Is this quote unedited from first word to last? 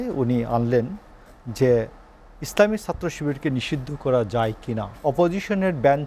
no; 1 cut; at 4.9 s

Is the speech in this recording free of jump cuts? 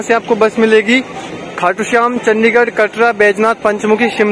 yes; 0 cuts

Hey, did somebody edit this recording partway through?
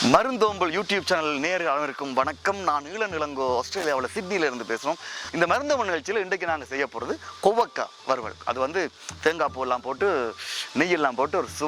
yes; 1 cut; at 5.2 s

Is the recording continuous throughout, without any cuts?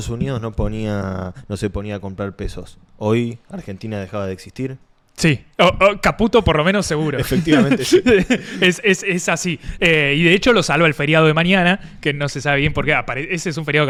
yes; 0 cuts

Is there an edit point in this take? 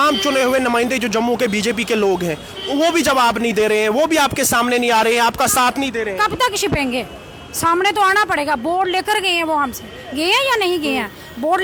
no; 0 cuts

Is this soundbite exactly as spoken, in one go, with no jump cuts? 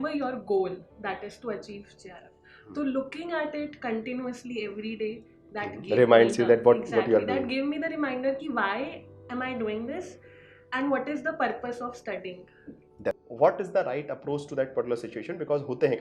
no; 1 cut; at 13.3 s

